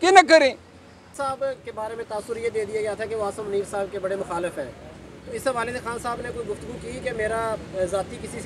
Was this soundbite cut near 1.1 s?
yes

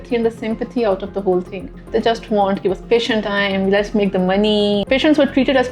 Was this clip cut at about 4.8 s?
yes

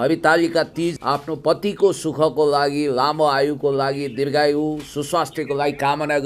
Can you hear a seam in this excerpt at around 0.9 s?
yes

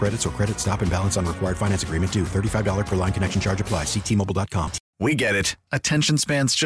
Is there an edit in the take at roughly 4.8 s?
yes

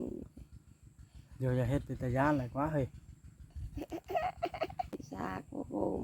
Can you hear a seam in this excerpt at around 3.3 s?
no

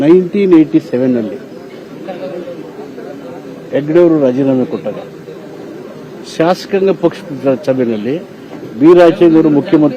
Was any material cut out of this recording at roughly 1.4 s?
no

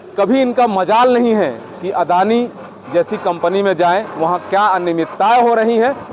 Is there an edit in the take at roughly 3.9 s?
no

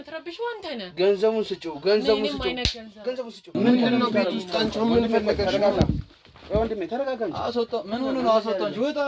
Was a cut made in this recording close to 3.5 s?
yes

